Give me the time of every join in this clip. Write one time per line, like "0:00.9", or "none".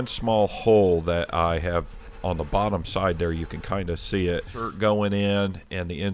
0:04.7